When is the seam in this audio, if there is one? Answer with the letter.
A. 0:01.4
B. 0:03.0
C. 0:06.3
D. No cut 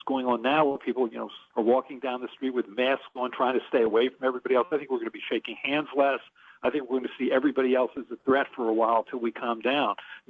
A